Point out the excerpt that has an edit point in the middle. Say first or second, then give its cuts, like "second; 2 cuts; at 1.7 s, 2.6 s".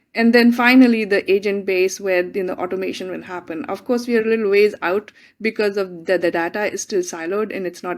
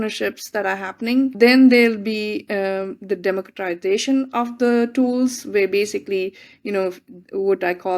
second; 1 cut; at 1.3 s